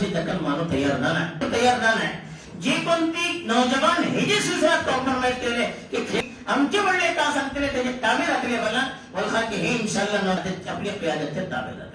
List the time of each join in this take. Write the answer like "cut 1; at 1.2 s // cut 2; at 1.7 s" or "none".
cut 1; at 1.4 s // cut 2; at 6.2 s // cut 3; at 10.4 s